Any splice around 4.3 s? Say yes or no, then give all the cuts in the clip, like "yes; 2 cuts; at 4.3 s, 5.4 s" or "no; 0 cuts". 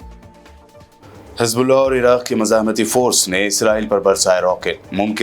no; 1 cut; at 1.0 s